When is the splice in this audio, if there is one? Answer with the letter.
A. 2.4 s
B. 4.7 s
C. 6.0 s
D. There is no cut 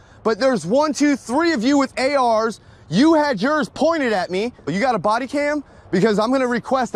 B